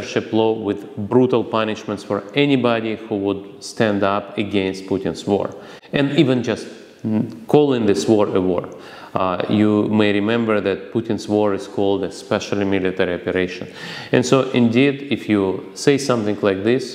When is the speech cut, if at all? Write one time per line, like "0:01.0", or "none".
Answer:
none

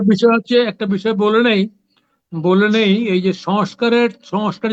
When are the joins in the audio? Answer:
none

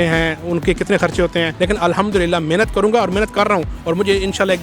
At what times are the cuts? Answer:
0:01.5

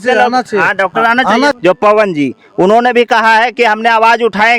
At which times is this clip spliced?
0:01.6

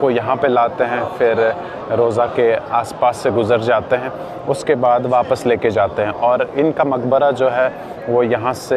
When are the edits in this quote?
none

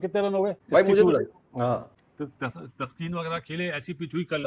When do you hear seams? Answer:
none

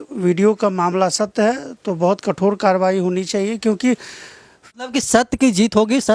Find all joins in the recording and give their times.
0:04.7

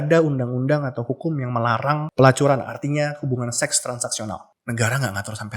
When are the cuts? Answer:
0:02.1
0:04.5

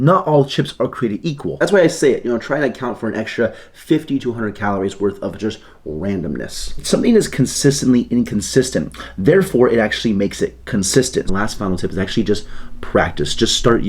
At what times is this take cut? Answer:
0:01.5
0:06.7
0:11.3

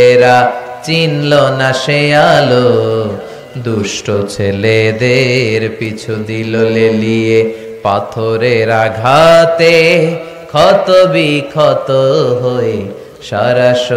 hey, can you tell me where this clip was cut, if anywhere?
none

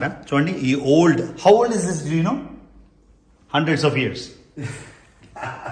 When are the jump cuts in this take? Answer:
none

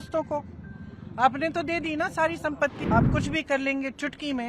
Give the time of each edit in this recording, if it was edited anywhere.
0:02.8

